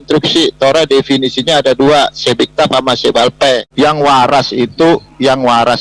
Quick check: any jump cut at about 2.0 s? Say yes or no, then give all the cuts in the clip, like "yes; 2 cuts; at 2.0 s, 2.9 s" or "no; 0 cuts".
no; 1 cut; at 3.7 s